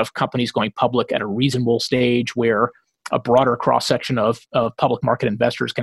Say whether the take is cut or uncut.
uncut